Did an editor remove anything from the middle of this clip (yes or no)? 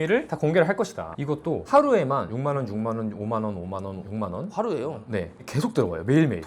yes